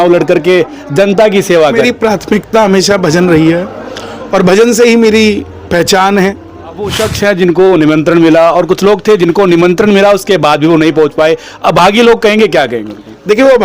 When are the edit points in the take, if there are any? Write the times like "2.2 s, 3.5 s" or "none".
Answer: 1.8 s, 7.0 s